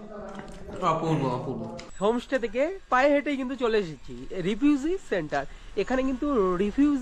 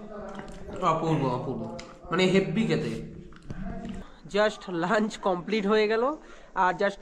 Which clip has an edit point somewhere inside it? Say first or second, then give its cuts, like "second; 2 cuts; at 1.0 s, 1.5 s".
first; 1 cut; at 1.8 s